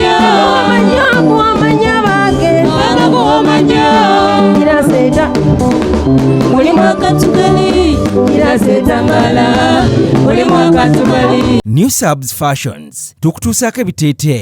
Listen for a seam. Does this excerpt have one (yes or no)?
yes